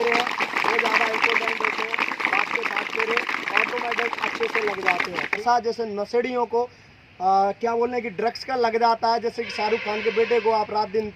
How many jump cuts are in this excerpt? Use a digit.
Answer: 1